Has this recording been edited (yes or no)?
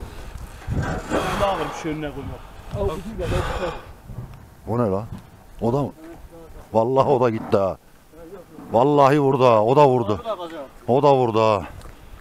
no